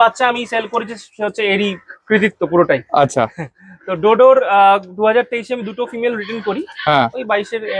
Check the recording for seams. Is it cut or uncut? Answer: uncut